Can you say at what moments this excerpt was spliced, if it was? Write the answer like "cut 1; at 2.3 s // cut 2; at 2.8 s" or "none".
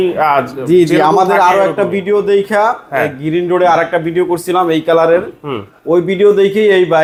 none